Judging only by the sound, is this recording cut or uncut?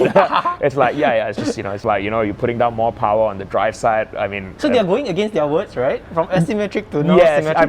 cut